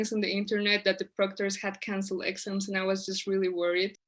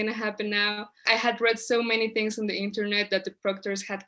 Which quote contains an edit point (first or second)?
second